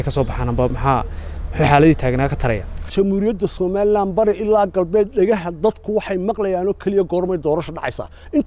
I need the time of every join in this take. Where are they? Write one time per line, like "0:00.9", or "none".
0:02.8